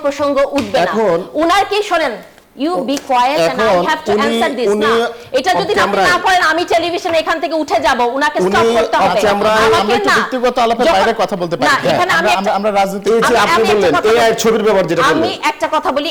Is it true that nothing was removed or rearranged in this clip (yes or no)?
yes